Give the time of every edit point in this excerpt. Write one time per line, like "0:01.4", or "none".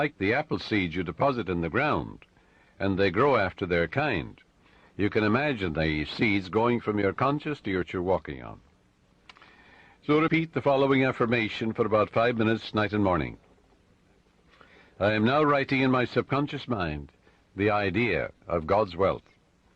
none